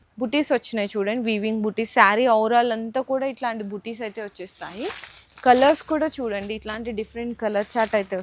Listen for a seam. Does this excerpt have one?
no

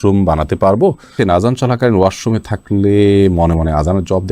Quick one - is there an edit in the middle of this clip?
yes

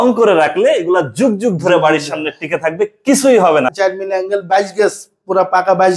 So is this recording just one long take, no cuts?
no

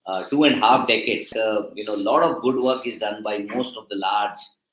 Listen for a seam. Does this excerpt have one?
yes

